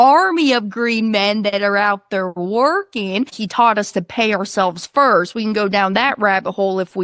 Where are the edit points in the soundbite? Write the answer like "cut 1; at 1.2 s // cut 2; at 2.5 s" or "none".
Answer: cut 1; at 3.4 s